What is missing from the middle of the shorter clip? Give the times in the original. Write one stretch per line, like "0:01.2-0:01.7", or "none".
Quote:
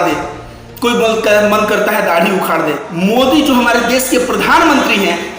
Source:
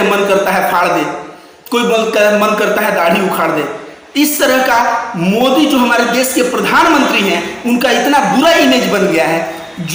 0:03.8-0:05.1